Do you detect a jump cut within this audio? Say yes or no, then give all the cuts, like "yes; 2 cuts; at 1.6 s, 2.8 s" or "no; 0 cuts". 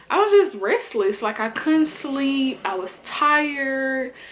no; 0 cuts